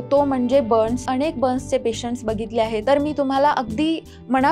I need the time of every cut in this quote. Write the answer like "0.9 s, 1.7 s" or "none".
1.0 s, 2.8 s